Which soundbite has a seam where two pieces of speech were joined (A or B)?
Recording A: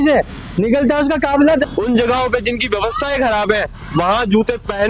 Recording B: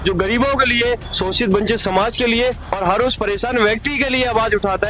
A